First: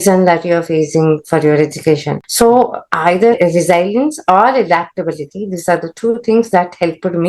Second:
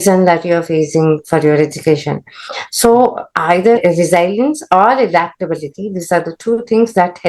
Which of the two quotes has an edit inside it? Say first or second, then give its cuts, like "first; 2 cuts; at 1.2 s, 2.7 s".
first; 1 cut; at 2.2 s